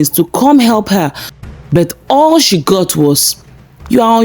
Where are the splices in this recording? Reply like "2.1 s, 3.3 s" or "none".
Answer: 1.3 s